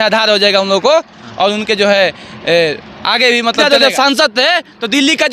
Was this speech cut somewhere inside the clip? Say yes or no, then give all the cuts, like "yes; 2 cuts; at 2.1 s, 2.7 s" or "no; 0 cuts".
yes; 1 cut; at 3.6 s